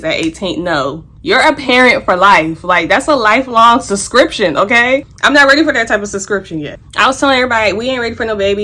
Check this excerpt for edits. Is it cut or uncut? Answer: cut